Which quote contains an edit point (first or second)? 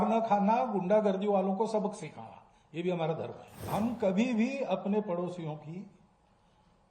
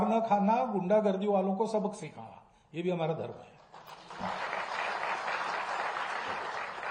first